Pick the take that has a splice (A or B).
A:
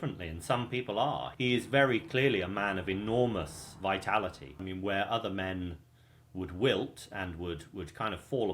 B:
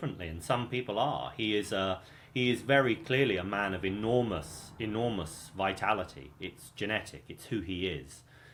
A